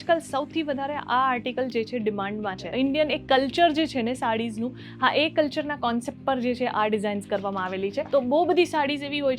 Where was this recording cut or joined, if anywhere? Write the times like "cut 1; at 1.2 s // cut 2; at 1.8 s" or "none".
cut 1; at 2.7 s // cut 2; at 8.1 s